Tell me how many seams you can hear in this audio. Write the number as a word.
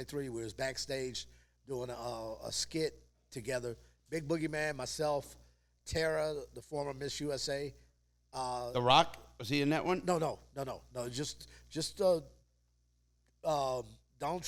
zero